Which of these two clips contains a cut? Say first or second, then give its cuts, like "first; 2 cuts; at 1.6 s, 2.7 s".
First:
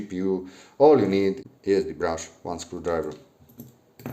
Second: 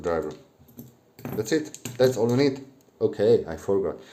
first; 1 cut; at 1.5 s